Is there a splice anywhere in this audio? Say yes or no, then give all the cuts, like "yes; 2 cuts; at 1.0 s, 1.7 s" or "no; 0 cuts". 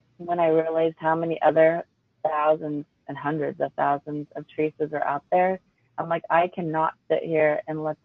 no; 0 cuts